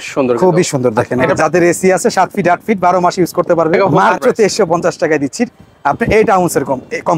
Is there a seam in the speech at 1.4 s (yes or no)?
yes